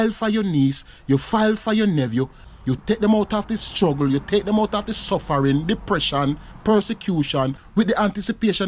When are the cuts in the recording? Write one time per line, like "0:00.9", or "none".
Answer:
0:02.7
0:07.6